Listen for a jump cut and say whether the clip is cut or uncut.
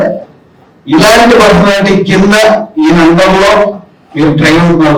uncut